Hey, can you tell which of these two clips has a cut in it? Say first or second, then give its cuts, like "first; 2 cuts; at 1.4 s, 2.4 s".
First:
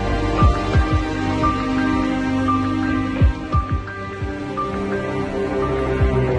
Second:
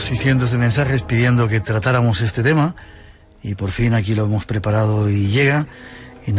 first; 1 cut; at 5.5 s